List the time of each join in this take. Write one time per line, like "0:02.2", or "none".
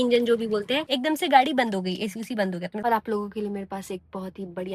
0:00.9
0:02.7